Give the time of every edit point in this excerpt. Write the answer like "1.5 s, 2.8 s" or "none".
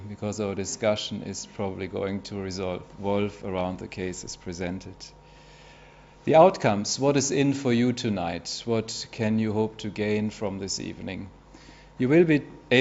8.8 s